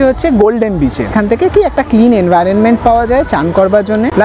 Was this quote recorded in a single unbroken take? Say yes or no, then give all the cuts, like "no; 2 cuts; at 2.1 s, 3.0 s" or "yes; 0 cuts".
no; 1 cut; at 1.1 s